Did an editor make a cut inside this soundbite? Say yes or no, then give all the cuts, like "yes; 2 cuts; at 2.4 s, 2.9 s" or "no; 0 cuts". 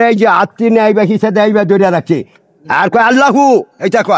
no; 0 cuts